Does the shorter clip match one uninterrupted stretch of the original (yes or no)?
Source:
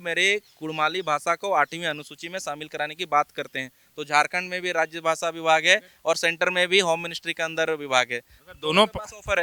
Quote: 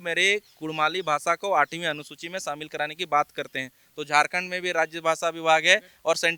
yes